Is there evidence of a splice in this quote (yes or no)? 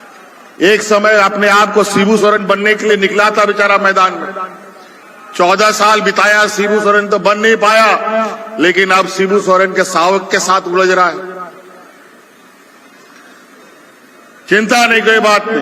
no